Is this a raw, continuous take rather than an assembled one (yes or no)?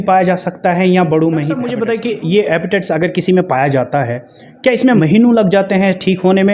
no